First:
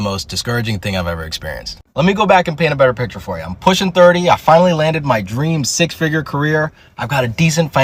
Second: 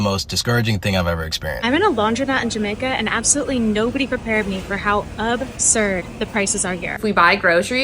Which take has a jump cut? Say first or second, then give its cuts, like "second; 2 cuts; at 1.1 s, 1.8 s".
second; 2 cuts; at 1.6 s, 7.0 s